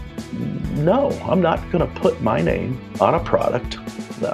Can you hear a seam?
yes; 1 cut; at 2.8 s

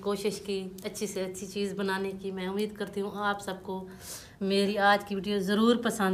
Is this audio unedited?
yes; 0 cuts

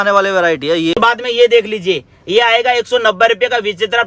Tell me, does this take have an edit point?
yes; 1 cut; at 1.0 s

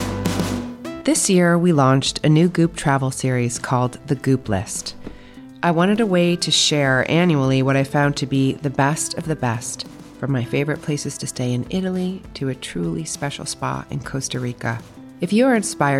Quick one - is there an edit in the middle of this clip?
yes; 1 cut; at 1.0 s

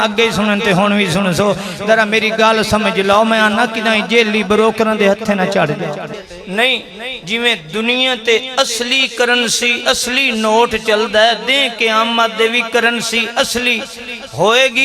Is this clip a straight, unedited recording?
no; 1 cut; at 6.1 s

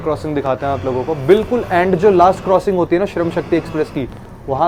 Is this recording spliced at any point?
no; 0 cuts

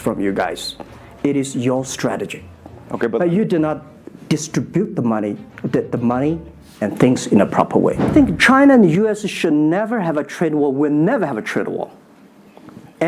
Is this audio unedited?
yes; 0 cuts

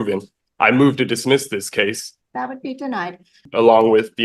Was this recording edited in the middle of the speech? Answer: yes; 2 cuts; at 2.1 s, 3.4 s

